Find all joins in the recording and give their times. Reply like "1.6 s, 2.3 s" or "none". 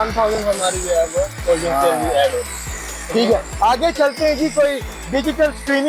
none